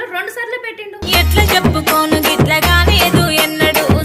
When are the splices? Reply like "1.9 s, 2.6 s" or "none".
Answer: 0.9 s